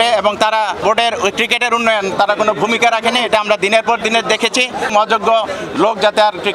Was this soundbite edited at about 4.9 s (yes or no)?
yes